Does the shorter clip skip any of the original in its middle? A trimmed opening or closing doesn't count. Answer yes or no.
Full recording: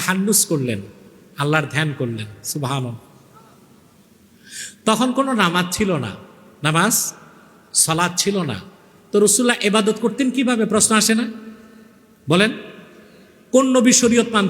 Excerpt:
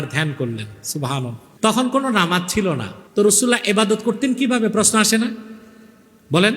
yes